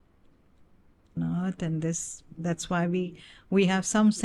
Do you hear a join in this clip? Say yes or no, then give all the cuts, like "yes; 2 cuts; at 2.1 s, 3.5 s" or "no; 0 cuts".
yes; 1 cut; at 1.2 s